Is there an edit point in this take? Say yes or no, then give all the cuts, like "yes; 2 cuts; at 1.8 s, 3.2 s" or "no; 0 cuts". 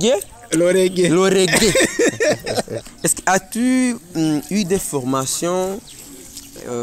yes; 1 cut; at 2.8 s